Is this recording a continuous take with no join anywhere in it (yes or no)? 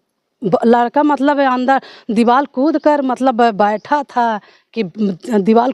yes